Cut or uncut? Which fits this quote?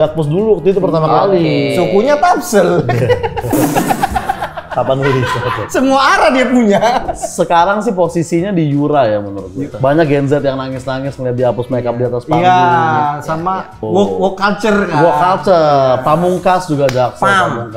cut